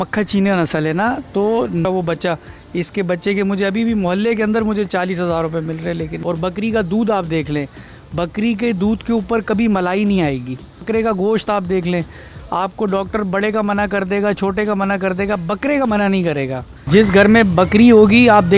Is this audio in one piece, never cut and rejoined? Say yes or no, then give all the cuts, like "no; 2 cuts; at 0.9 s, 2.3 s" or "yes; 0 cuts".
no; 4 cuts; at 1.8 s, 6.2 s, 10.8 s, 16.7 s